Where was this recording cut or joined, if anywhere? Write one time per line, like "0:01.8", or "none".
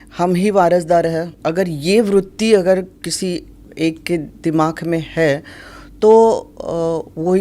0:01.3